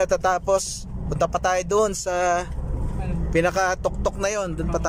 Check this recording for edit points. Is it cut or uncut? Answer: uncut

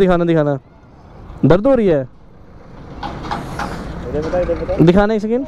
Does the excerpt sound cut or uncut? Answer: uncut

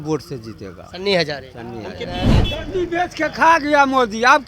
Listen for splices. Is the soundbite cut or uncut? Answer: cut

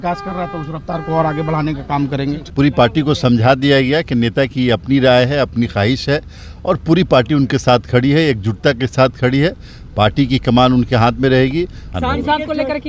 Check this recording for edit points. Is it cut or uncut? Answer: cut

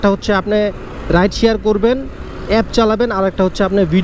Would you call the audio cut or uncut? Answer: uncut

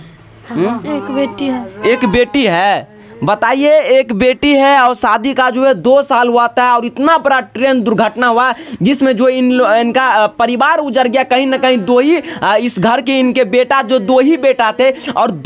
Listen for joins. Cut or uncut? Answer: uncut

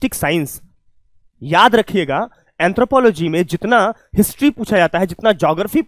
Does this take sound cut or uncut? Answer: uncut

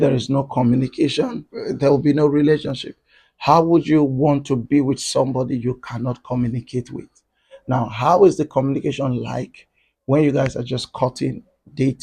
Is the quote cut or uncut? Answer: cut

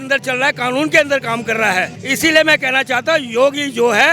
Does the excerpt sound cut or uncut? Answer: cut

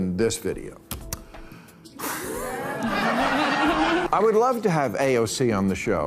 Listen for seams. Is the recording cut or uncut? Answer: cut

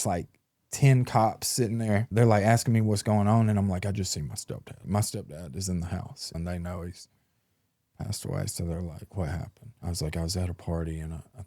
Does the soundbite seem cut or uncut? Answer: cut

